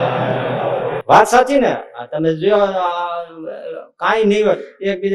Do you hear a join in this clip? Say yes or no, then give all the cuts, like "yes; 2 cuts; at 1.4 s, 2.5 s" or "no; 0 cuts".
yes; 1 cut; at 1.0 s